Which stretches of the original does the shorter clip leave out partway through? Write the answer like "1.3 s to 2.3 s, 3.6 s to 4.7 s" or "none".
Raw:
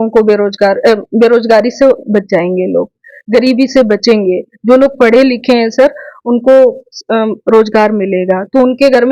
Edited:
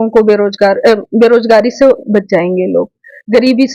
none

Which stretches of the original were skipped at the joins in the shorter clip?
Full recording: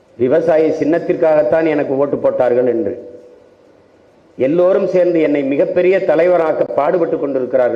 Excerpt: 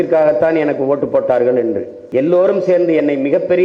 3.0 s to 4.2 s

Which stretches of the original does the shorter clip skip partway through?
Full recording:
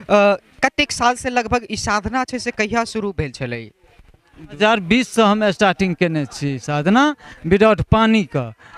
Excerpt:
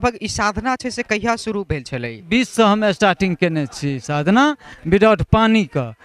3.7 s to 4.8 s

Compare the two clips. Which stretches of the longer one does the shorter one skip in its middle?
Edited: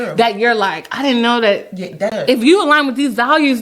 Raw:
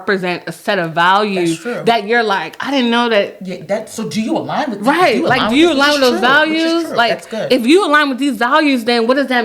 3.8 s to 7.4 s

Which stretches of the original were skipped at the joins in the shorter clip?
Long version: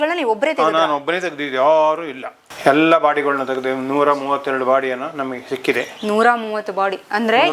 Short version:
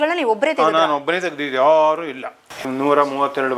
2.6 s to 3.7 s

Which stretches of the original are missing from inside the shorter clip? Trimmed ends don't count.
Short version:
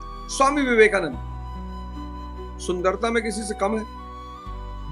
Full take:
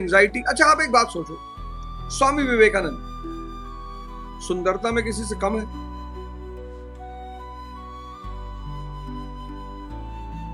5.7 s to 7.6 s

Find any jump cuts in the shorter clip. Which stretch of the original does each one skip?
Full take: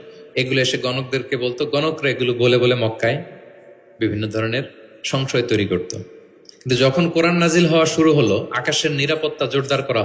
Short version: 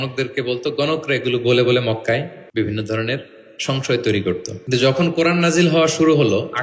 3.3 s to 3.8 s, 6.0 s to 6.5 s

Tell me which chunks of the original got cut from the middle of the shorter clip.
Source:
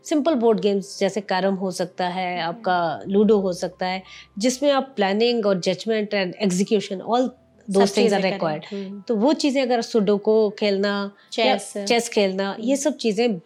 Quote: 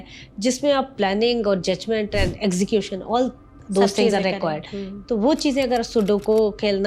none

